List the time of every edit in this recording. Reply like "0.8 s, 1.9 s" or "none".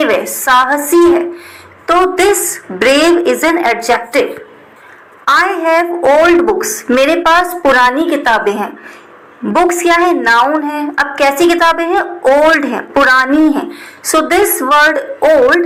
none